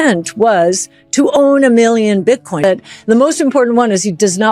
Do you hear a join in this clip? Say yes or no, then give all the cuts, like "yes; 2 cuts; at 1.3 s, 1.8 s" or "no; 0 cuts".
yes; 1 cut; at 2.6 s